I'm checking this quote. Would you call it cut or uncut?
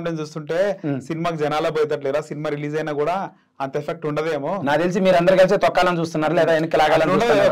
uncut